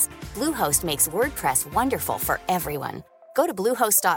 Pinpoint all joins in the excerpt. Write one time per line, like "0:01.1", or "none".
none